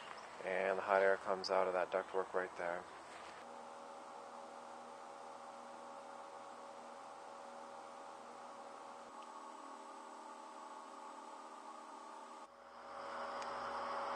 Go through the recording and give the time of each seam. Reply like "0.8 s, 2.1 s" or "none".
none